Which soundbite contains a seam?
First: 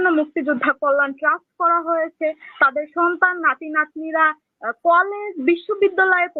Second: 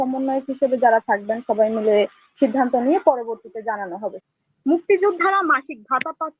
second; 1 cut; at 4.2 s

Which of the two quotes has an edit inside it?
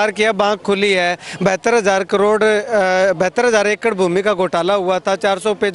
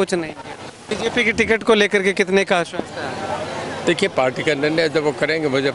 second; 1 cut; at 0.9 s

